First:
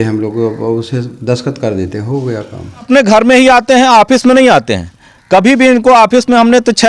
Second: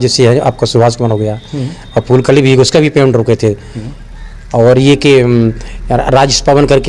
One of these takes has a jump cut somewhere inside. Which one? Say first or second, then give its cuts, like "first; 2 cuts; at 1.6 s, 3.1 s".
first; 1 cut; at 2.9 s